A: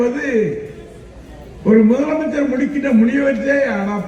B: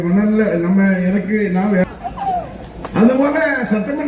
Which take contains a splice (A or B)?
B